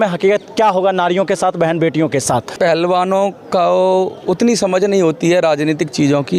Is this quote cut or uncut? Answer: cut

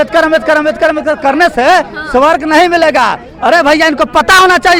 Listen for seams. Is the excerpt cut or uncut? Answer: uncut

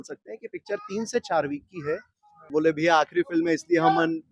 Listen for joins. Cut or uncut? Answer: cut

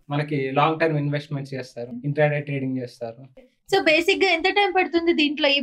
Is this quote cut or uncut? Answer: cut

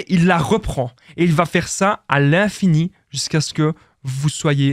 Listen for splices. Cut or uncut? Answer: uncut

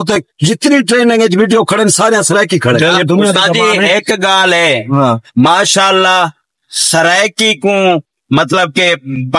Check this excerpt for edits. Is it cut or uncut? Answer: cut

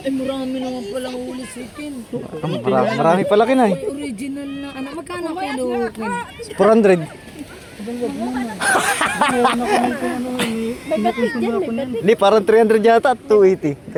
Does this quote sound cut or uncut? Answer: uncut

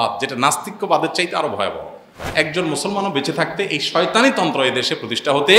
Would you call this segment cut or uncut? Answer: cut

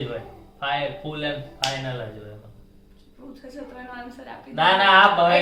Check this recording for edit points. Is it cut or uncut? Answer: uncut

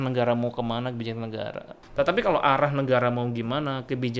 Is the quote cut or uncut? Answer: cut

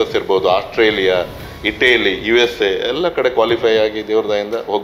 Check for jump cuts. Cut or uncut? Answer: uncut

